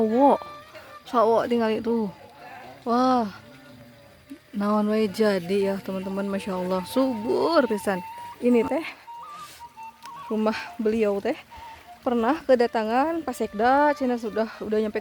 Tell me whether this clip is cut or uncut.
cut